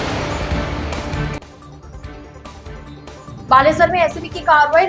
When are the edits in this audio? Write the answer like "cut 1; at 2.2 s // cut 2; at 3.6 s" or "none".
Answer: cut 1; at 2.8 s